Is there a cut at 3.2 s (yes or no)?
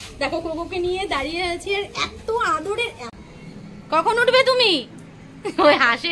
yes